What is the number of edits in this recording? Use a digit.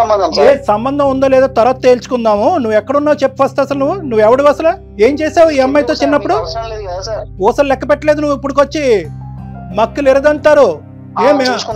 1